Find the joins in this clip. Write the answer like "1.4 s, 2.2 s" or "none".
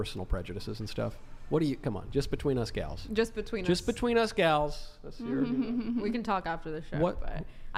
none